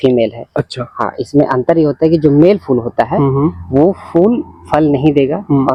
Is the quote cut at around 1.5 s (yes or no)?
no